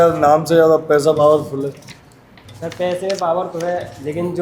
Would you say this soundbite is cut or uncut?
uncut